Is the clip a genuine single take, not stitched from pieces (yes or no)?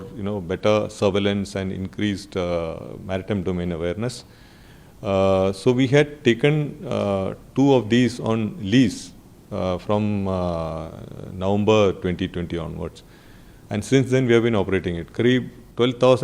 yes